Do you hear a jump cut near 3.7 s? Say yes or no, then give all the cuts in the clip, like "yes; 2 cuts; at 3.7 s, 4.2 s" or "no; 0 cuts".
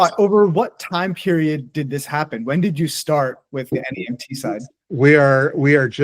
yes; 1 cut; at 3.7 s